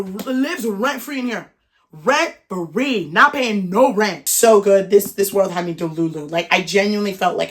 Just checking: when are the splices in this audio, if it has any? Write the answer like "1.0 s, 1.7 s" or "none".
4.2 s